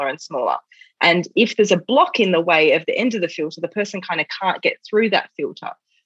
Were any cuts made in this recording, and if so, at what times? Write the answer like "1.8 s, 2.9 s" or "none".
none